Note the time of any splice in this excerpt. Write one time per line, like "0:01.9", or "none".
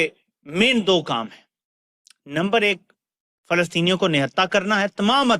none